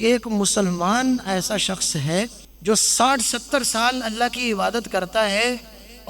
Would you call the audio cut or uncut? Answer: cut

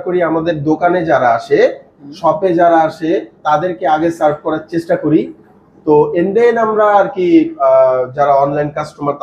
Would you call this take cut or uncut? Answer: uncut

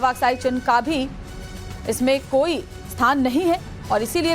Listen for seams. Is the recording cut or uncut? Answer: cut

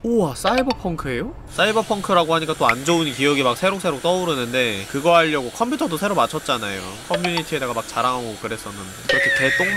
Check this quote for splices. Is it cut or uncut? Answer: cut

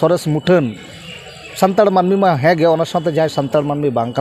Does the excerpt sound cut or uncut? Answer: uncut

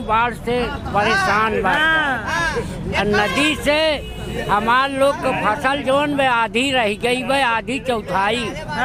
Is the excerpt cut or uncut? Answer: uncut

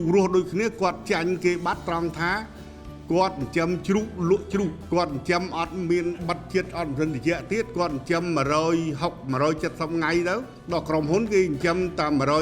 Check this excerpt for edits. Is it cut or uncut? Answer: cut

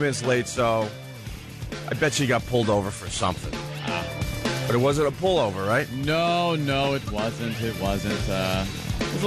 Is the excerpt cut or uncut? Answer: cut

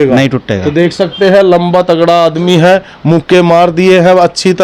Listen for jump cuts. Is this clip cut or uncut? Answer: uncut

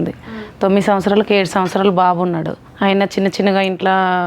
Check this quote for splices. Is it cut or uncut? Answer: cut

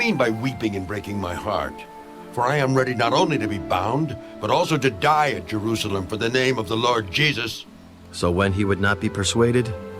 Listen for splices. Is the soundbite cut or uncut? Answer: cut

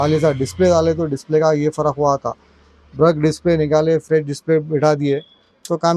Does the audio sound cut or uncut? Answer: uncut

